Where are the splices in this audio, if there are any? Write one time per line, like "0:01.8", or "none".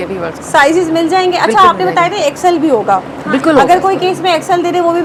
none